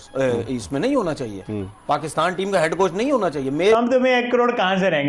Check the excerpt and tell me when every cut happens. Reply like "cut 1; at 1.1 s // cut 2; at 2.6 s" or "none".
cut 1; at 3.8 s